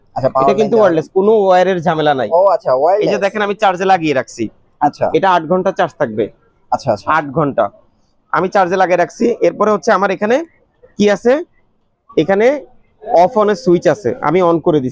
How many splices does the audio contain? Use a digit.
0